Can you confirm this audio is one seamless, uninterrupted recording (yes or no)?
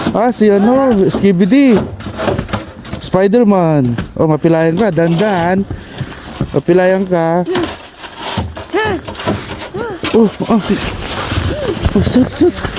no